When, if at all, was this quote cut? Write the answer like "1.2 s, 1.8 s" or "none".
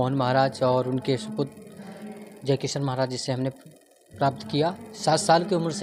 4.9 s